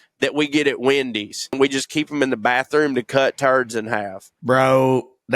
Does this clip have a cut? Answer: yes; 1 cut; at 1.6 s

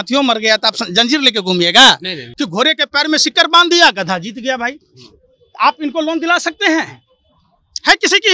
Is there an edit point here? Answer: yes; 1 cut; at 2.2 s

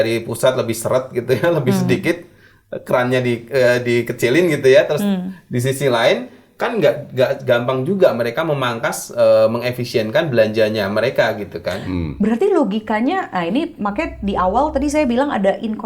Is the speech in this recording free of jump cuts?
yes; 0 cuts

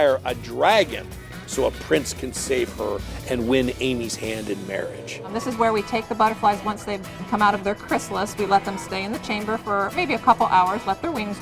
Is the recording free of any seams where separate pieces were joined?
no; 2 cuts; at 5.4 s, 7.2 s

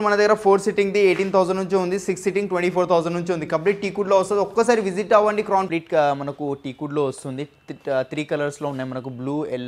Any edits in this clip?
yes; 1 cut; at 5.7 s

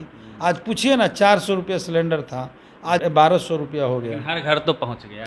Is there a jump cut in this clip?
yes; 1 cut; at 3.0 s

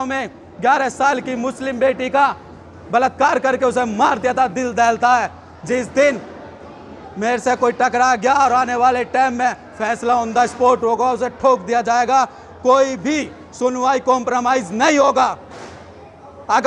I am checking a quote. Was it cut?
no; 0 cuts

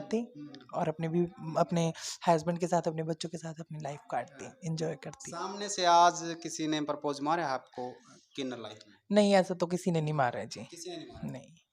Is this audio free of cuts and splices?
yes; 0 cuts

